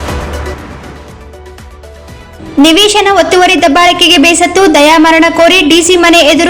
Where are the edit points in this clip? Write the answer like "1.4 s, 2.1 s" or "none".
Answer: 2.1 s